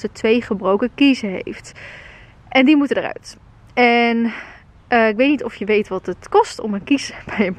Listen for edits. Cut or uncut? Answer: uncut